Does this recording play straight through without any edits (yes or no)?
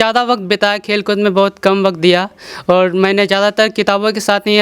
yes